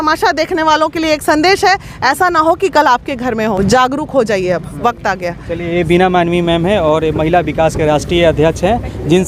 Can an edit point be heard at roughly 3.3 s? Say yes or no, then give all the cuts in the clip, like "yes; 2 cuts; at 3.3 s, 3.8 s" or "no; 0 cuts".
no; 0 cuts